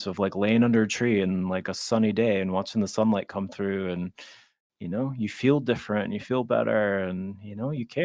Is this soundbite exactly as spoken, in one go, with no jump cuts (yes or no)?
yes